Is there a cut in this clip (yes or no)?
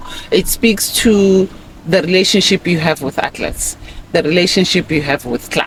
no